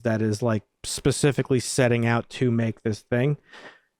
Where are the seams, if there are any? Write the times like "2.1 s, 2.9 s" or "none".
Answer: none